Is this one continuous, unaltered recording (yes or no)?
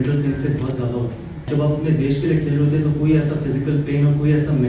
no